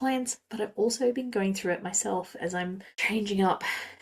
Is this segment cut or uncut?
cut